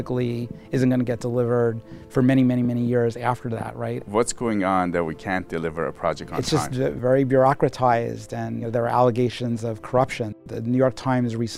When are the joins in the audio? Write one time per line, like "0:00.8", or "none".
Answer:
0:04.0
0:07.0
0:08.7
0:10.4